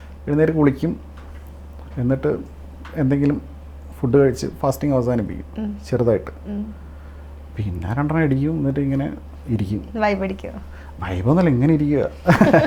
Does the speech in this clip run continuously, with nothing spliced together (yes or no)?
yes